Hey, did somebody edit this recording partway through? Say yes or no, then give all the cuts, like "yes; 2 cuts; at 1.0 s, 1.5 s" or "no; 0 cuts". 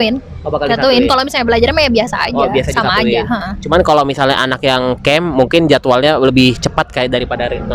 no; 0 cuts